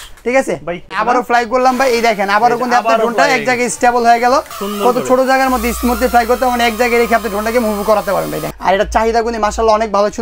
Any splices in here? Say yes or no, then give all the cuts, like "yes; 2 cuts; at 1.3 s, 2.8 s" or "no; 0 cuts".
yes; 3 cuts; at 1.0 s, 4.6 s, 8.5 s